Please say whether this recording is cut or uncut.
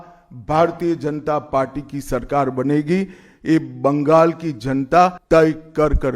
cut